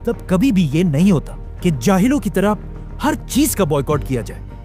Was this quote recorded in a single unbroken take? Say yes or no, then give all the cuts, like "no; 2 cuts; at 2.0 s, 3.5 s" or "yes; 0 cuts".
yes; 0 cuts